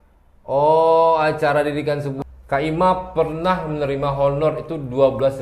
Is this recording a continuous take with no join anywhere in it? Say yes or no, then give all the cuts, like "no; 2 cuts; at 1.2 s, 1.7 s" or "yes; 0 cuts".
no; 1 cut; at 2.1 s